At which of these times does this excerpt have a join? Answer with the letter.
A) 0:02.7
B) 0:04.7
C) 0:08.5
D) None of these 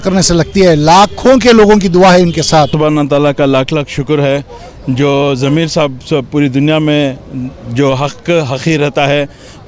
A